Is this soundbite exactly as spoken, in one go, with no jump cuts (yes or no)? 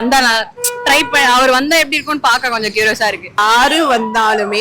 no